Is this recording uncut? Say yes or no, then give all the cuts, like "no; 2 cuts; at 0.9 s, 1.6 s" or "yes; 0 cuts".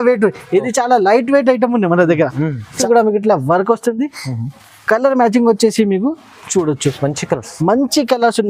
no; 1 cut; at 2.8 s